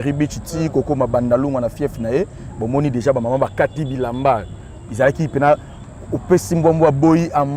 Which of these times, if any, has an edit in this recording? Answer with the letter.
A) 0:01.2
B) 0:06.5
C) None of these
C